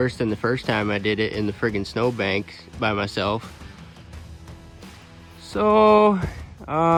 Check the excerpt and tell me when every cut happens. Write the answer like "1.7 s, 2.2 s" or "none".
none